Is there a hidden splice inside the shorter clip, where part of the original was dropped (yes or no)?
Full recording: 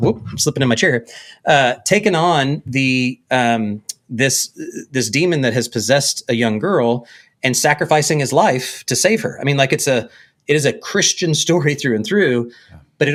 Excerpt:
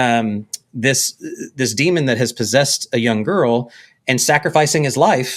no